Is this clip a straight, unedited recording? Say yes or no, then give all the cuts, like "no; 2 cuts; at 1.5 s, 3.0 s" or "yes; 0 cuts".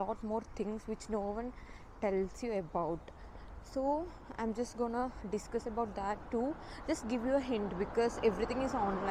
yes; 0 cuts